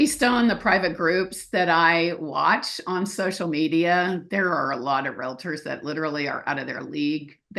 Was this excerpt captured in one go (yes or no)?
yes